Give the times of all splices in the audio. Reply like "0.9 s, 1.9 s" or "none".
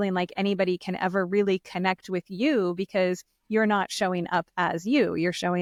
none